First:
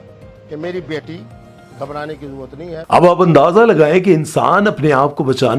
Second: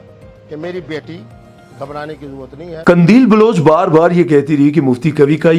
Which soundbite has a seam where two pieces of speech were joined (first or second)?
second